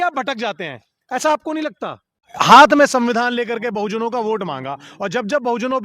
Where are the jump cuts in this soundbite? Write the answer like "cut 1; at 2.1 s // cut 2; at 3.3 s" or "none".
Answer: cut 1; at 2.3 s